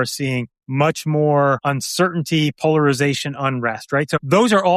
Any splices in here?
no; 0 cuts

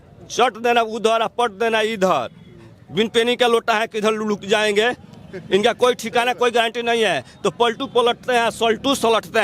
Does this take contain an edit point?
no; 0 cuts

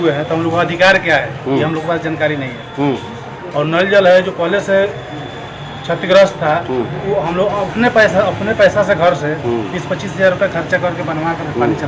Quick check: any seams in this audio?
no; 0 cuts

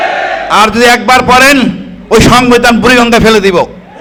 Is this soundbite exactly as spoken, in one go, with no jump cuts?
yes; 0 cuts

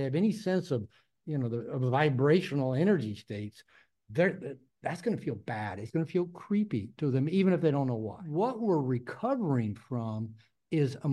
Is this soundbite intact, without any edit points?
no; 1 cut; at 8.2 s

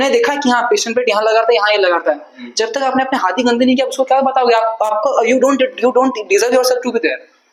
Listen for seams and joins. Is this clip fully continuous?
yes; 0 cuts

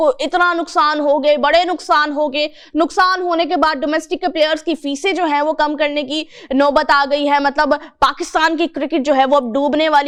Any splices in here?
no; 0 cuts

